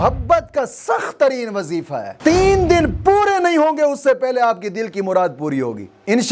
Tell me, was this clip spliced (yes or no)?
yes